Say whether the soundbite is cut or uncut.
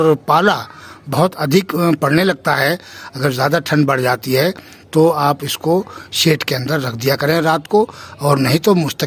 uncut